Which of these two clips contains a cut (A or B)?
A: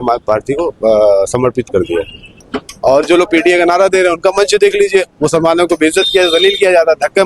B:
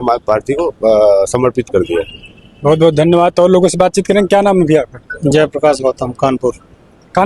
A